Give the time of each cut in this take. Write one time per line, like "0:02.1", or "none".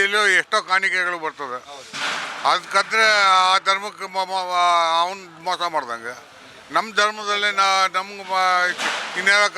none